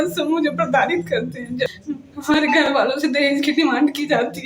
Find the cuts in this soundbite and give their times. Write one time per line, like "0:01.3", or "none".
0:01.7